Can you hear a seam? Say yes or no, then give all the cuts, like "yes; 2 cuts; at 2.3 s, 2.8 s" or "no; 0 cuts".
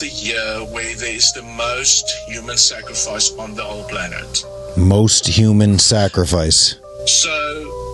no; 0 cuts